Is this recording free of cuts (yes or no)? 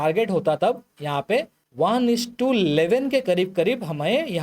no